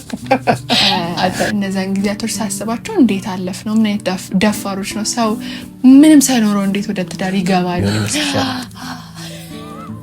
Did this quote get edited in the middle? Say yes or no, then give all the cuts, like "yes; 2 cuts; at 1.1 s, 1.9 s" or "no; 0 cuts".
yes; 2 cuts; at 1.5 s, 8.0 s